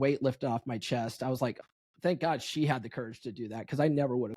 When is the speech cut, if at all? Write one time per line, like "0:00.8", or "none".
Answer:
0:01.6